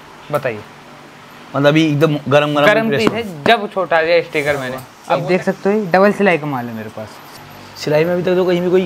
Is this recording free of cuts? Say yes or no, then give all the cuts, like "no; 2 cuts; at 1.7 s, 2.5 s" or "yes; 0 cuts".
no; 2 cuts; at 4.9 s, 7.3 s